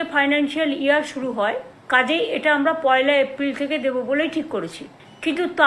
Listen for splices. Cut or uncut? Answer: cut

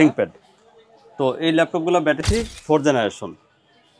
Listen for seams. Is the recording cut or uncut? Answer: cut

